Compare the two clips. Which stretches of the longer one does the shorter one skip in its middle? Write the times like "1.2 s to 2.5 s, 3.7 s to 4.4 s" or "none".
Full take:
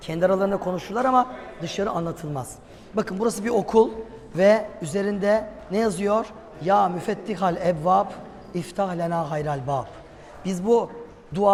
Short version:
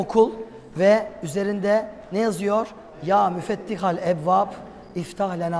none